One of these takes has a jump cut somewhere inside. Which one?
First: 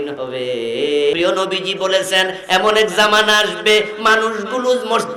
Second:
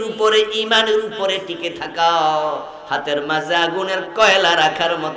first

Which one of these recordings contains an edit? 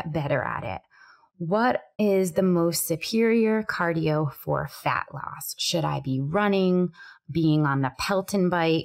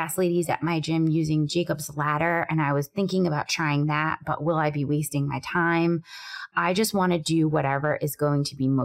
first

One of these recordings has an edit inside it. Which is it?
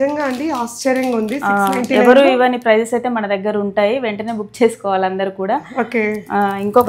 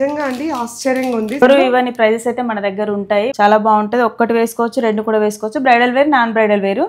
second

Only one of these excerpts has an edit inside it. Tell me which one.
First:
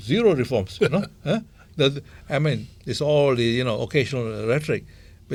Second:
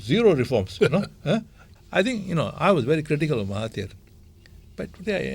second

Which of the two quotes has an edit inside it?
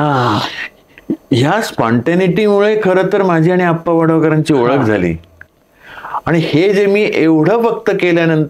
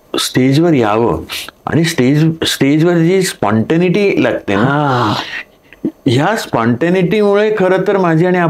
first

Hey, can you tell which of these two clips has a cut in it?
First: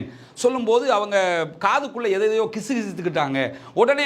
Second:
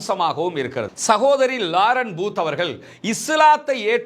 second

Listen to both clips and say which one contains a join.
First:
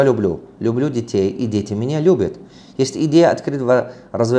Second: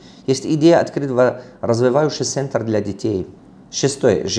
second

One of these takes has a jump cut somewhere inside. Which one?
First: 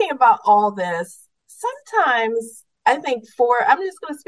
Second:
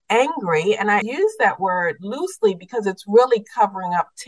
second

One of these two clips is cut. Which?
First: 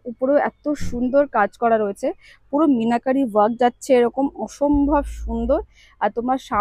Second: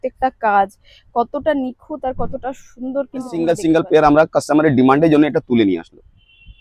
second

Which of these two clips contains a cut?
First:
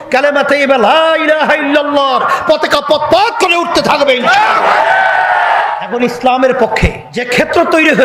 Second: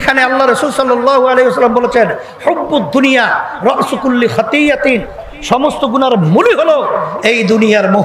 first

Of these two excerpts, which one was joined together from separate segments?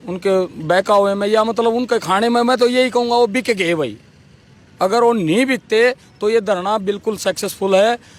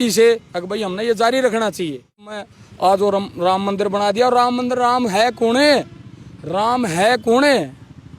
second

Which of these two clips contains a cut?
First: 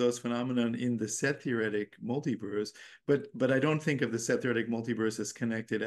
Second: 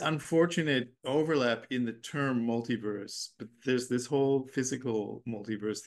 second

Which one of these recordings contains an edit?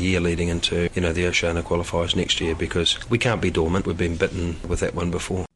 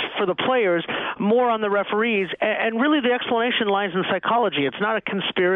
first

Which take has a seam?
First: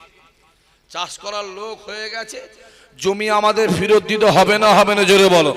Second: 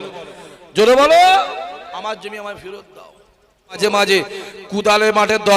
second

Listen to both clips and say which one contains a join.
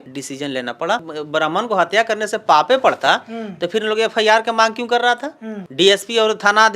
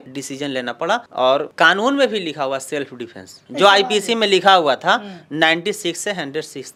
first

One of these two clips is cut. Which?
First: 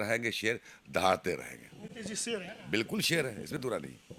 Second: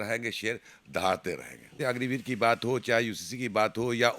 second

